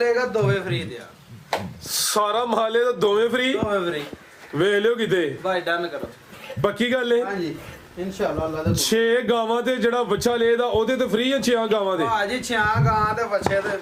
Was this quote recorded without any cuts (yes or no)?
yes